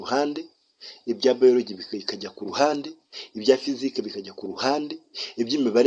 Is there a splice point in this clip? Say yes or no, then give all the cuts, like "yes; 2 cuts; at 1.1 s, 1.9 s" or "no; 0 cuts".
no; 0 cuts